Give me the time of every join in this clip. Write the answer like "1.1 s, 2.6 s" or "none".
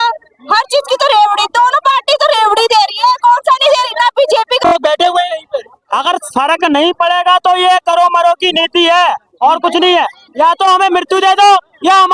4.6 s

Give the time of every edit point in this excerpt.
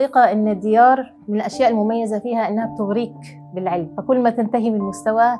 1.2 s, 3.9 s

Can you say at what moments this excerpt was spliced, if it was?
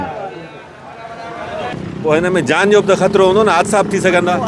1.6 s

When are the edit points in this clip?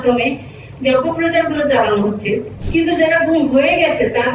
2.6 s

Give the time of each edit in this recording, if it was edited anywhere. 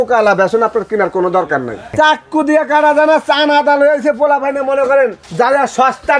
1.9 s, 5.2 s

